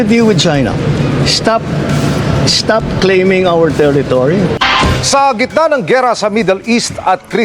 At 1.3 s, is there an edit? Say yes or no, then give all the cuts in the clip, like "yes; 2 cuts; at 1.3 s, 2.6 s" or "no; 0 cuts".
no; 1 cut; at 4.6 s